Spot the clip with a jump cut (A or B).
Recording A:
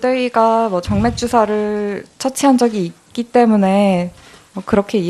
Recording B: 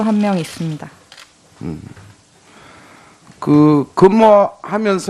B